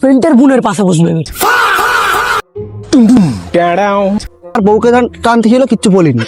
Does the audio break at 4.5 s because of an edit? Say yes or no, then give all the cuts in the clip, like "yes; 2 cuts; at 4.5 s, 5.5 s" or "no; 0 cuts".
yes; 1 cut; at 4.5 s